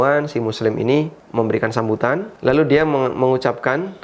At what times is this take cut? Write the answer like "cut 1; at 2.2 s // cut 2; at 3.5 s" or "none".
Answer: cut 1; at 1.2 s // cut 2; at 2.3 s